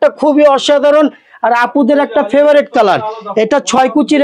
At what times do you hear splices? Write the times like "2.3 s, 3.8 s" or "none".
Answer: none